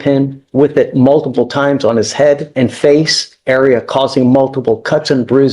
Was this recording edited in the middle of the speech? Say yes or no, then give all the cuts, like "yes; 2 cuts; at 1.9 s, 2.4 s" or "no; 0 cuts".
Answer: yes; 1 cut; at 2.5 s